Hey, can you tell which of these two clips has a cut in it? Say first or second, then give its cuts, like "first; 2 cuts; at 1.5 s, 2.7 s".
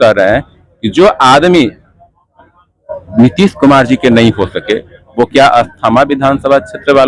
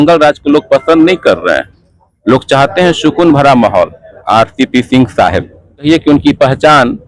second; 2 cuts; at 4.1 s, 5.9 s